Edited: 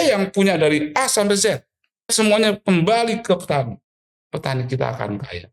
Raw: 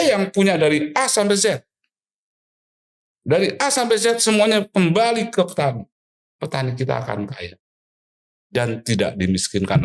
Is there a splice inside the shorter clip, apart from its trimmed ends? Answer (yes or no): yes